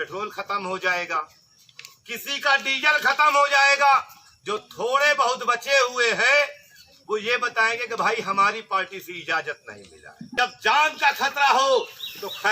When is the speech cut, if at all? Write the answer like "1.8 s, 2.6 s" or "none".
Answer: 10.2 s